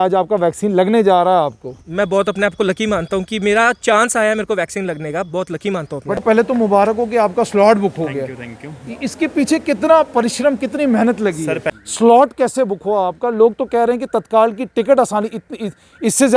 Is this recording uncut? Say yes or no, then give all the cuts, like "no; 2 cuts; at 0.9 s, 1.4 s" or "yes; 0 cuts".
no; 2 cuts; at 6.2 s, 11.8 s